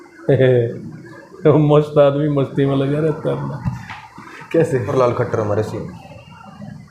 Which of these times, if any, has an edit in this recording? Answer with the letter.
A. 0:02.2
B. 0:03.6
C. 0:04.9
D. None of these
C